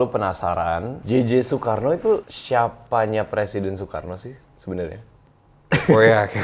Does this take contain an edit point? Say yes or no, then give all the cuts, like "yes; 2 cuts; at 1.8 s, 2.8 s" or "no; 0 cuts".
yes; 2 cuts; at 0.9 s, 2.3 s